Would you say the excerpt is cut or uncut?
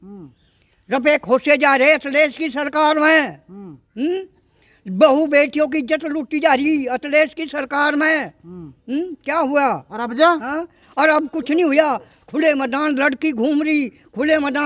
uncut